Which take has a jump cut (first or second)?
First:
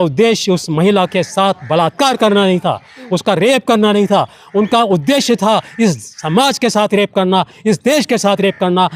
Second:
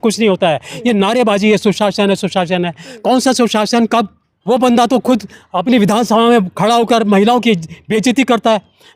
second